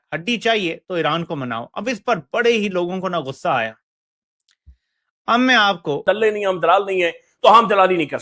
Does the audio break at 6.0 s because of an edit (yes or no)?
yes